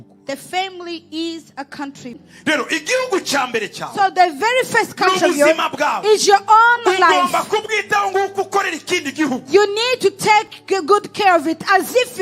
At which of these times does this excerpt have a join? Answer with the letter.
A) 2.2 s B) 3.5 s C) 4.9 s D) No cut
A